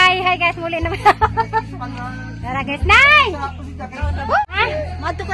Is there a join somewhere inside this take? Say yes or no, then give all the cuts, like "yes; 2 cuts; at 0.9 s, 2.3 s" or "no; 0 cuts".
yes; 1 cut; at 4.4 s